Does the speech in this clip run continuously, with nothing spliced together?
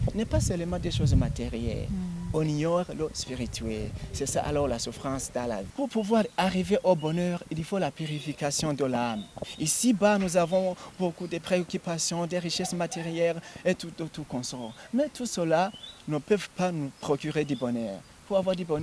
no; 2 cuts; at 5.7 s, 9.4 s

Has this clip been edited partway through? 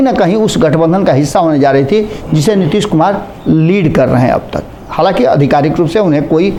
no; 0 cuts

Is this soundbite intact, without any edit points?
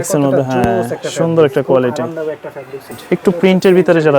no; 1 cut; at 2.9 s

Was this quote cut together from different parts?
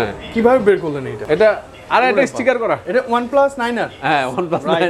yes; 2 cuts; at 1.1 s, 2.8 s

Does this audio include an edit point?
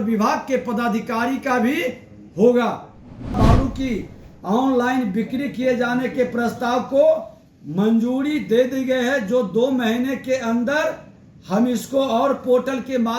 yes; 1 cut; at 3.4 s

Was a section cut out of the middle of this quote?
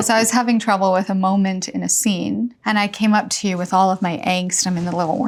no; 0 cuts

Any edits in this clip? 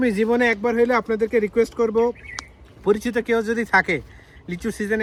no; 0 cuts

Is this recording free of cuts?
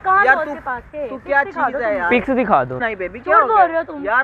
no; 1 cut; at 2.9 s

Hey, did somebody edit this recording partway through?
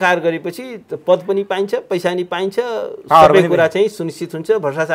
no; 0 cuts

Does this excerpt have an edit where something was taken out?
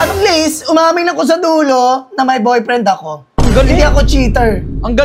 no; 0 cuts

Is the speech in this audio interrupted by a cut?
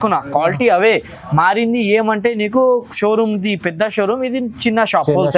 no; 0 cuts

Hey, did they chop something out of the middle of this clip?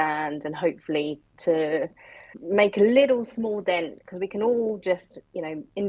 no; 0 cuts

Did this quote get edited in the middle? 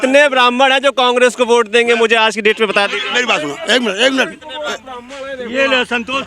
no; 0 cuts

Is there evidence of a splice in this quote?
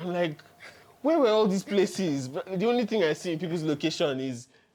no; 0 cuts

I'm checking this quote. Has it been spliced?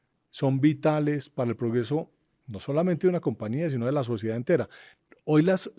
no; 0 cuts

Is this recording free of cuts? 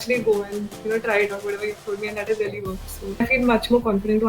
no; 1 cut; at 3.2 s

